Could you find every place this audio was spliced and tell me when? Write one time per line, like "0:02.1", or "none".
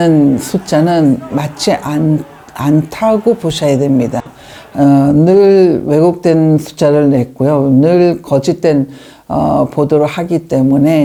none